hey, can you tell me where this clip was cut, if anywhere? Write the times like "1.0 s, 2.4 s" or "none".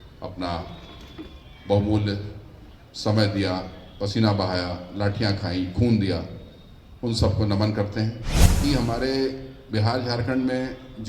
8.6 s